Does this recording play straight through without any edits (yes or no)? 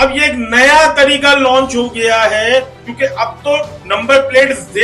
yes